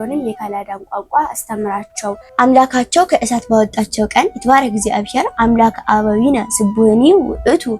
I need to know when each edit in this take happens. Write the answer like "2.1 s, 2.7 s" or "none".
2.3 s